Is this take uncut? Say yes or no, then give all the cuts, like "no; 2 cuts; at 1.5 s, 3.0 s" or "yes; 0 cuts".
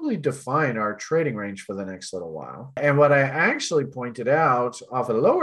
yes; 0 cuts